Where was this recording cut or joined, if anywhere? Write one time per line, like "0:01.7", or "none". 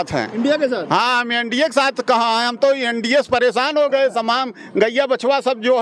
none